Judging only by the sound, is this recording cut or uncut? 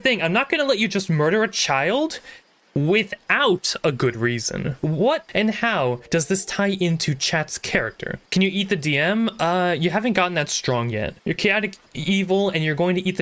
uncut